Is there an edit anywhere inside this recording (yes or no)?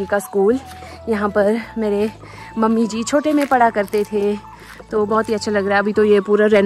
no